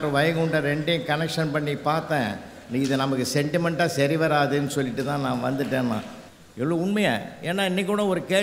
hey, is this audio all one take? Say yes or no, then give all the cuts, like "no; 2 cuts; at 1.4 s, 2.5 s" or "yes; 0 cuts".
no; 1 cut; at 6.2 s